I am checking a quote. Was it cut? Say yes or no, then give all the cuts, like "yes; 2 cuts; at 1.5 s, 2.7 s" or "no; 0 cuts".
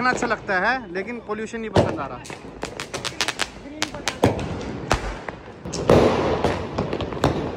no; 0 cuts